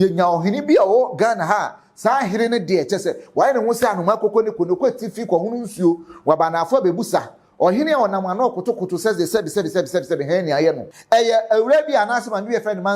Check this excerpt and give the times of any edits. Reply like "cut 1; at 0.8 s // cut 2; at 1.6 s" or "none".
cut 1; at 10.9 s